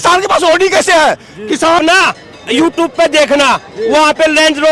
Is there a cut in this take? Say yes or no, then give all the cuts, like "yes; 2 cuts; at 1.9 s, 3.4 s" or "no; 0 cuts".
yes; 1 cut; at 1.8 s